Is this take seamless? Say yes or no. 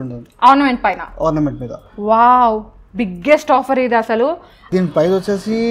no